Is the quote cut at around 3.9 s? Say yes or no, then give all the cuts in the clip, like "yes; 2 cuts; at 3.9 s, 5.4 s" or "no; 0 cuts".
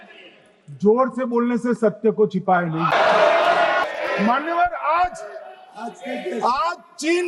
yes; 2 cuts; at 2.9 s, 3.9 s